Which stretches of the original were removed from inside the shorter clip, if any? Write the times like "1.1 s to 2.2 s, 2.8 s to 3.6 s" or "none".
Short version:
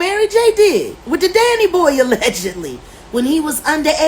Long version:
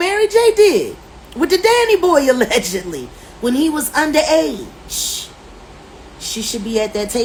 1.0 s to 1.3 s